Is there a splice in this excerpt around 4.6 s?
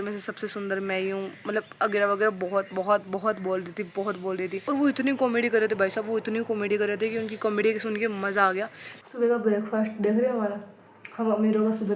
yes; 2 cuts; at 4.6 s, 8.8 s

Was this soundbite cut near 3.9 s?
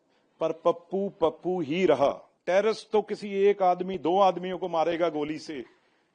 no; 1 cut; at 2.3 s

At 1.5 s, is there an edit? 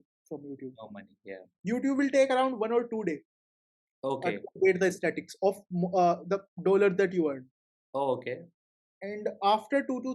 yes; 1 cut; at 1.5 s

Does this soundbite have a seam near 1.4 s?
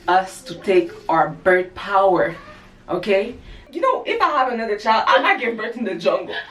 no; 1 cut; at 3.6 s

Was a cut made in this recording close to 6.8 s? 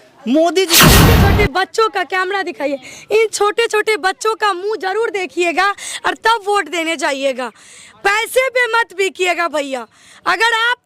no; 1 cut; at 1.1 s

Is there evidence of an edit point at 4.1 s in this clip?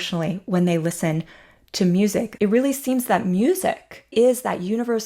yes; 2 cuts; at 2.3 s, 4.1 s

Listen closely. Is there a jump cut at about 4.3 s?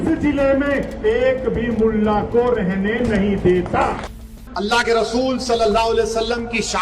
yes; 1 cut; at 4.3 s

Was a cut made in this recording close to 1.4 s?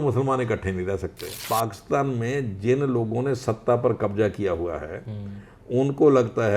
yes; 1 cut; at 1.4 s

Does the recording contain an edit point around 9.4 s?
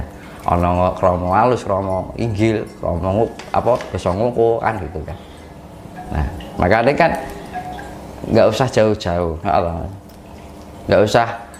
no; 0 cuts

